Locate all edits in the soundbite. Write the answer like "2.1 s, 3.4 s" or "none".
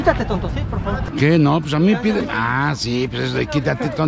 1.1 s